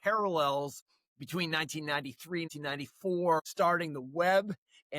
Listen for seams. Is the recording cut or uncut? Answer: cut